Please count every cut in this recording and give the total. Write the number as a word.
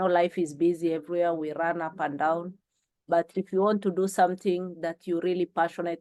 zero